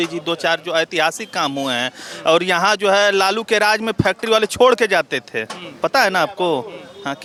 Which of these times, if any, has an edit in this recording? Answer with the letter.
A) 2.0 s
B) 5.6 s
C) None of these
C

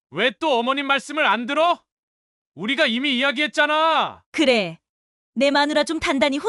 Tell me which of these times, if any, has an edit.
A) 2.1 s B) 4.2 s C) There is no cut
B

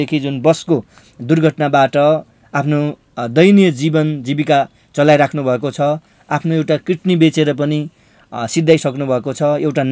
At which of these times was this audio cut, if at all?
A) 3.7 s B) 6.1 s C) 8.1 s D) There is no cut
D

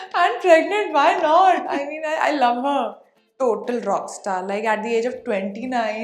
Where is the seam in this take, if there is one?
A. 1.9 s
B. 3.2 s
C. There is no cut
B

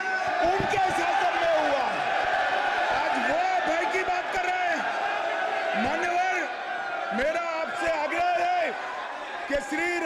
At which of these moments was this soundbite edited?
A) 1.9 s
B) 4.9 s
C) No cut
C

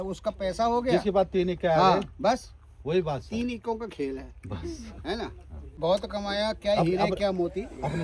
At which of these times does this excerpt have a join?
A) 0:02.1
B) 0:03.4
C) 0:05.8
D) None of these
D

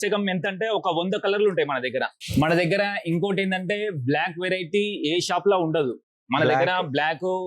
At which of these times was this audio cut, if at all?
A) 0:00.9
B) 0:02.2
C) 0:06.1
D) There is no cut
B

